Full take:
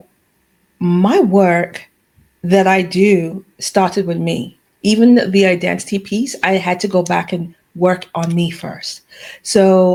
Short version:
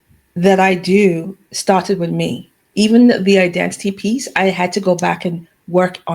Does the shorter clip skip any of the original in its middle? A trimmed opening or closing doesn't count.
no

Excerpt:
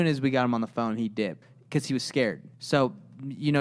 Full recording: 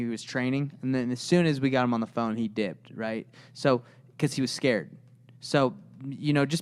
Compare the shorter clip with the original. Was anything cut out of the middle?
yes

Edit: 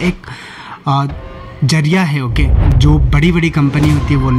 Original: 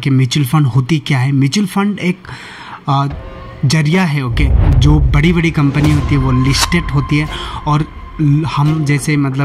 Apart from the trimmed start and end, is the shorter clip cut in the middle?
no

